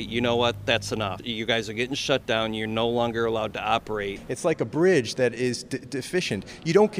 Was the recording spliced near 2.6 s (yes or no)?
no